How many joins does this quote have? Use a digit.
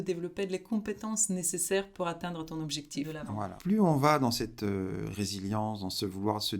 1